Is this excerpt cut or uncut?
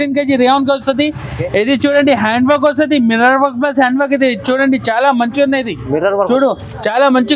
uncut